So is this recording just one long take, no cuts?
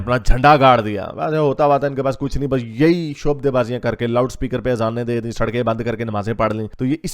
yes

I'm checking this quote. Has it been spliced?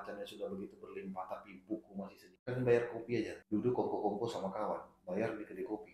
yes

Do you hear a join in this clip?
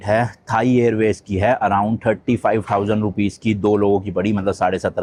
no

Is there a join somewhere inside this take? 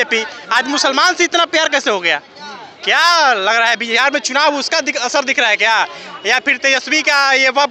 no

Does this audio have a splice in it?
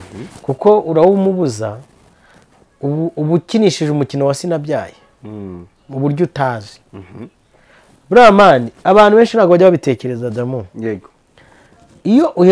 no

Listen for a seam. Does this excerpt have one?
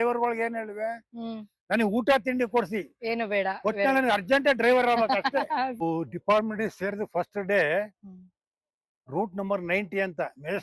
yes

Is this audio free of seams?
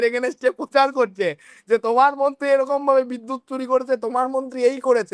yes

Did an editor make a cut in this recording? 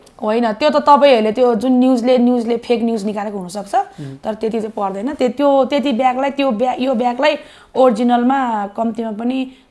no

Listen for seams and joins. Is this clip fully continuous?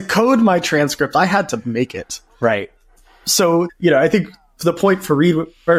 yes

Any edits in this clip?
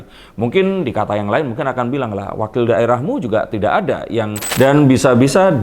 yes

